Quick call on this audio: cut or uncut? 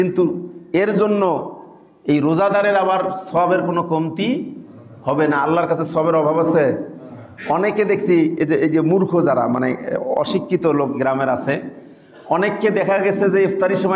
uncut